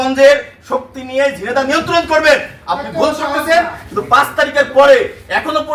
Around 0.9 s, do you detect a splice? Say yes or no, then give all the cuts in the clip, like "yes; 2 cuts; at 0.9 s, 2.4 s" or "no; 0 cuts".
no; 0 cuts